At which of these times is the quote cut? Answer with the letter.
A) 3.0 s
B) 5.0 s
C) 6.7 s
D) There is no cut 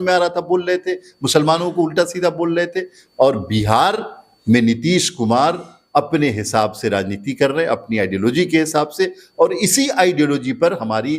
A